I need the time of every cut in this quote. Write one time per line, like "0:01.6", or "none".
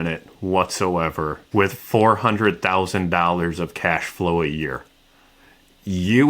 0:01.4